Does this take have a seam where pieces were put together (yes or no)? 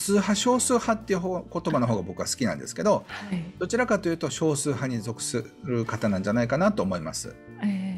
no